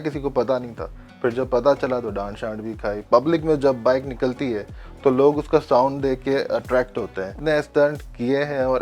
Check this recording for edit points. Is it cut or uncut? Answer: cut